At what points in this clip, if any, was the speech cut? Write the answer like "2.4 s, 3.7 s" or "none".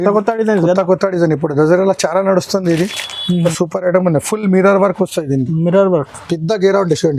3.5 s